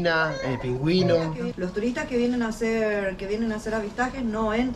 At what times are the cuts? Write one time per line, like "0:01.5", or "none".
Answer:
0:01.5